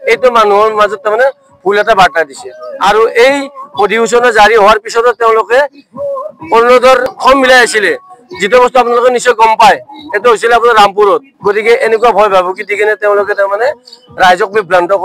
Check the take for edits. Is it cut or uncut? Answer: cut